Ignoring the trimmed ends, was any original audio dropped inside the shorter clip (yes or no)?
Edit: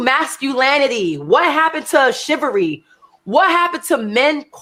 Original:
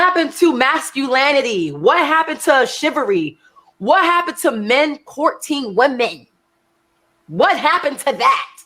no